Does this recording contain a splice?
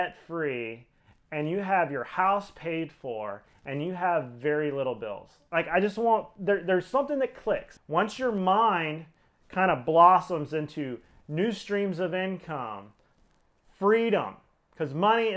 yes; 1 cut; at 7.7 s

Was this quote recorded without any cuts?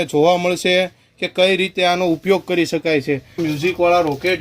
no; 1 cut; at 3.4 s

